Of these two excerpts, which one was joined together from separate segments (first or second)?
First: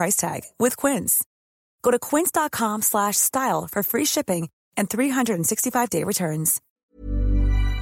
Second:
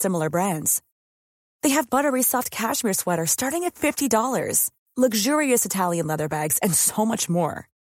first